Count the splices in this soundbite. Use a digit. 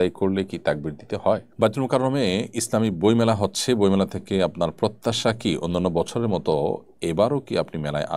1